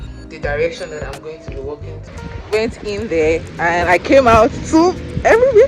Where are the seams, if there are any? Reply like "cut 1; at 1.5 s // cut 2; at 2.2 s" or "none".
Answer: cut 1; at 2.0 s